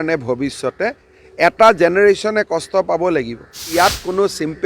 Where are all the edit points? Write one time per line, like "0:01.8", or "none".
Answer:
0:03.7